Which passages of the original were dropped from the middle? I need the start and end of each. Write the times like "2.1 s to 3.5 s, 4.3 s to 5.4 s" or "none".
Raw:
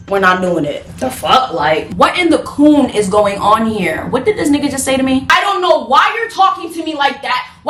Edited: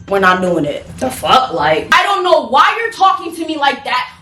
1.9 s to 5.2 s